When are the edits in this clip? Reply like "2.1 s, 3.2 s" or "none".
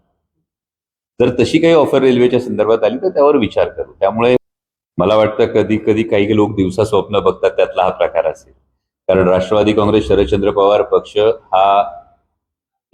4.4 s